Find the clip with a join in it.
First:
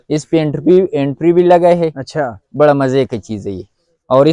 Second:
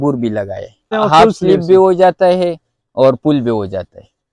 second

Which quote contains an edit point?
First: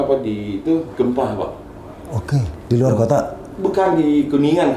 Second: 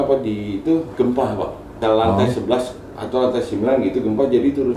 second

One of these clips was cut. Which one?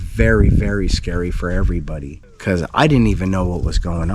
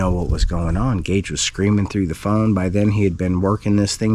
first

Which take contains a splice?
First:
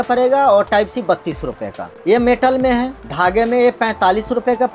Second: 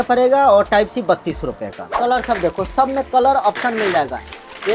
second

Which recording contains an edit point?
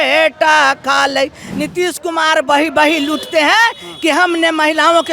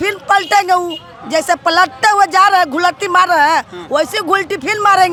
first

